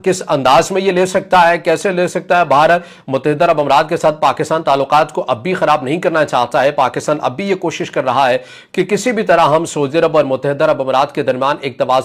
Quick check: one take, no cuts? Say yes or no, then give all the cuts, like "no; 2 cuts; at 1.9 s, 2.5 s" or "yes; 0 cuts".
yes; 0 cuts